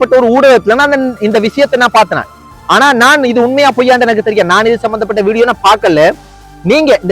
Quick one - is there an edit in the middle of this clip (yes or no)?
no